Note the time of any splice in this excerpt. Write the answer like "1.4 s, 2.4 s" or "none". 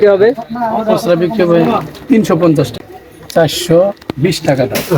2.7 s